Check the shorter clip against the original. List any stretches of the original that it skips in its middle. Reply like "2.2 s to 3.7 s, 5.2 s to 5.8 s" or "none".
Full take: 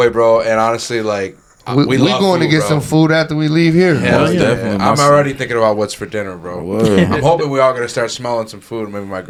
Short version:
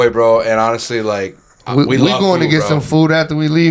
none